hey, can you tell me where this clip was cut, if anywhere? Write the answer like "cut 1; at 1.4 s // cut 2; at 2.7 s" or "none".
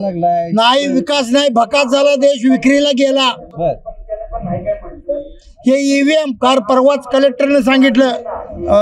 none